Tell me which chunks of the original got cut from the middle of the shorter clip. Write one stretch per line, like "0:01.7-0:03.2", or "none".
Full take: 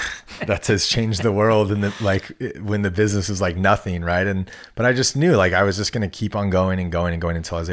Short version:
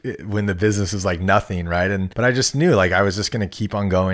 0:04.5-0:04.7